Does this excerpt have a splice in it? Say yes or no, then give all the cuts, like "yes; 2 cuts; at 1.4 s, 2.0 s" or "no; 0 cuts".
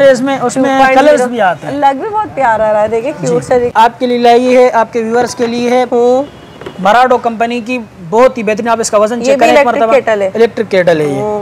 yes; 1 cut; at 3.7 s